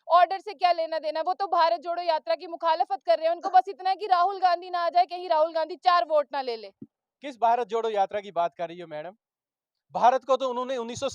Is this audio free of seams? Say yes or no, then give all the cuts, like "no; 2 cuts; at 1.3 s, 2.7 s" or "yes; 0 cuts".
yes; 0 cuts